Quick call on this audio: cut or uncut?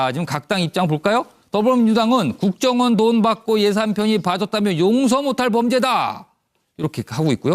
cut